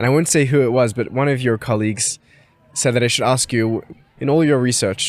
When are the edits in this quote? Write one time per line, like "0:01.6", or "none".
0:03.8